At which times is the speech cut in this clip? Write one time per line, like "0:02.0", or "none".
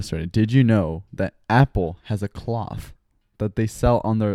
none

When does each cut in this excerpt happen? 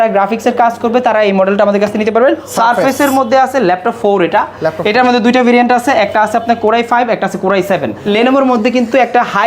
0:02.5
0:08.0

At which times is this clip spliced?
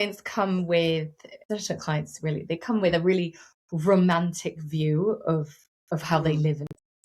0:01.5

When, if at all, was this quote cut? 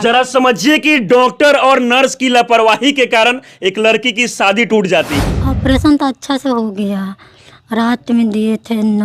0:05.3

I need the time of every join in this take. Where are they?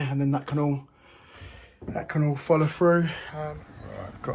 0:03.3

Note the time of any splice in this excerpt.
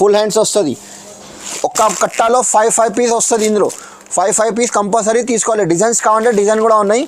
0:01.4

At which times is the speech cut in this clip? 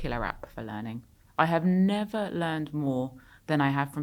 none

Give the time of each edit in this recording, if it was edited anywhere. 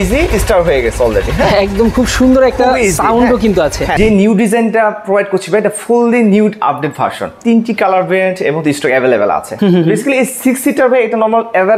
0:03.9
0:07.4
0:09.5

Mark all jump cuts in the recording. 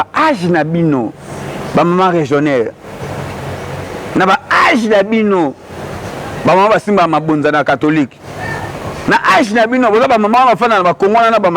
0:10.3

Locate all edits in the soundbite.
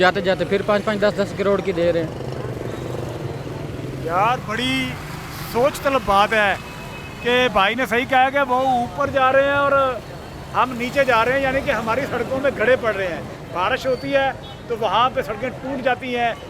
none

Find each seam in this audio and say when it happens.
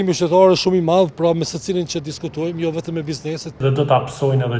0:03.6

